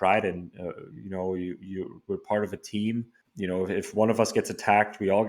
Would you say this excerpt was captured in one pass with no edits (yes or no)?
no